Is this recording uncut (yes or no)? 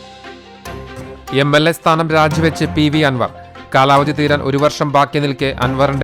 yes